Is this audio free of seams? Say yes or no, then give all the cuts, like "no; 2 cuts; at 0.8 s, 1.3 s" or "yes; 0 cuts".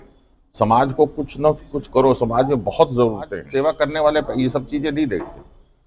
no; 1 cut; at 3.3 s